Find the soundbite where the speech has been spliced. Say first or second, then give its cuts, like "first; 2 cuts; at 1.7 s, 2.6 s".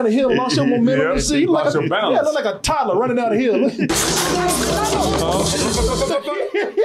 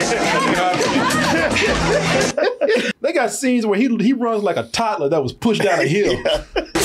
second; 1 cut; at 2.9 s